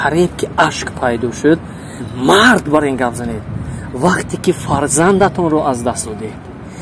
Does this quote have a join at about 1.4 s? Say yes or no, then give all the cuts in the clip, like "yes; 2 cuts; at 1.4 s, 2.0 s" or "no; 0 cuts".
no; 0 cuts